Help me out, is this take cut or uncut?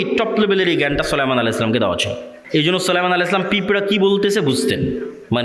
cut